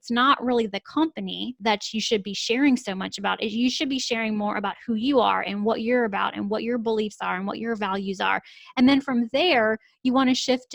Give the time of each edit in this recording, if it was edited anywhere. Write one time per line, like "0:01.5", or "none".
0:01.5